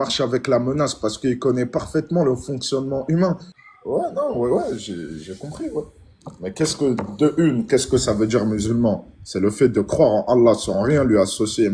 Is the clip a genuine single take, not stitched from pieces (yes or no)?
no